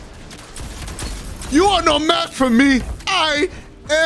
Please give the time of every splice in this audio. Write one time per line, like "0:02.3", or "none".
0:01.5
0:03.0